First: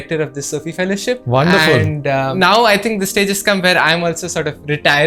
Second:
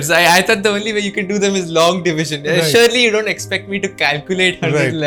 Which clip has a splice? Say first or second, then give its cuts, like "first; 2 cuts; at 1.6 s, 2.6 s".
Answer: first; 2 cuts; at 1.2 s, 2.3 s